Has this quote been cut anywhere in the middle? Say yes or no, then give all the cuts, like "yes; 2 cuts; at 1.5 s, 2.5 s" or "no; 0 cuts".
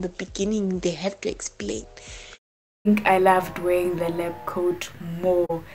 yes; 1 cut; at 2.9 s